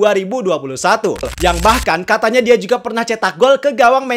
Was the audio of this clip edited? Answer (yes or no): yes